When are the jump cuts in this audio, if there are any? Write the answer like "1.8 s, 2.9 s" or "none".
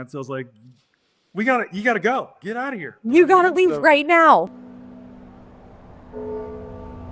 none